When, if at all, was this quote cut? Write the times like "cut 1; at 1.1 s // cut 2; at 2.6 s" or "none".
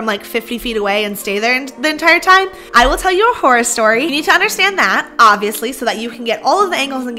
cut 1; at 2.6 s // cut 2; at 4.2 s